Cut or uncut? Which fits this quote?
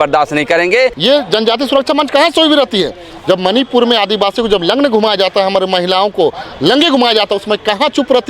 cut